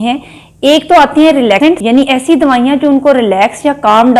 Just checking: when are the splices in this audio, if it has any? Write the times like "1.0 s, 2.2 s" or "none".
1.6 s

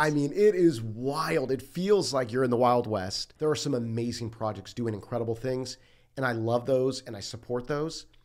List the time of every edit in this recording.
3.2 s

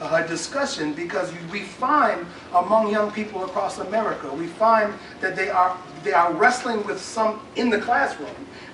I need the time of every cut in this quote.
2.7 s

